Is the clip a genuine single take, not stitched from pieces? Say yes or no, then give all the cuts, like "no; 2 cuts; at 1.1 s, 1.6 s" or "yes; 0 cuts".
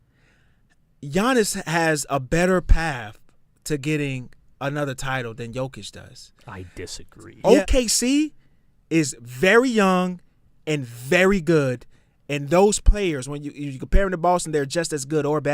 no; 1 cut; at 7.3 s